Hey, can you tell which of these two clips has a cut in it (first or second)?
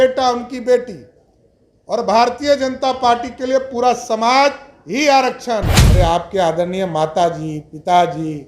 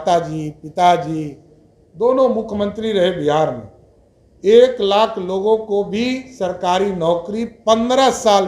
first